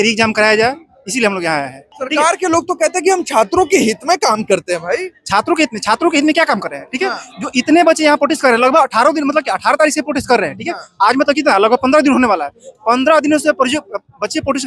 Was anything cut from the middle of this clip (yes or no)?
no